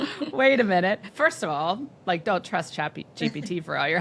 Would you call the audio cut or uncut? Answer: cut